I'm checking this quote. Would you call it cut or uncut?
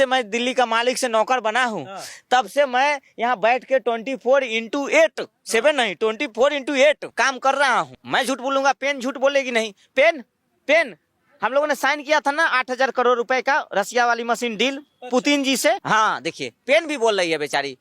cut